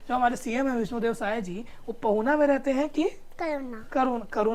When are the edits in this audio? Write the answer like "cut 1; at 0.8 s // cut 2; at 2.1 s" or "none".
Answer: none